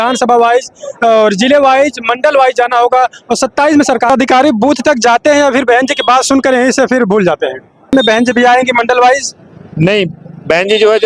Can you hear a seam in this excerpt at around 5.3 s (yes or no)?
no